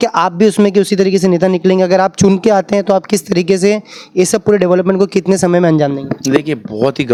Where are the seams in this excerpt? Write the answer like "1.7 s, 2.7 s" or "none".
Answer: none